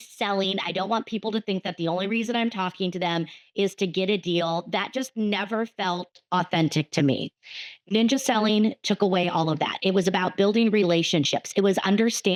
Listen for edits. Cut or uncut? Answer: uncut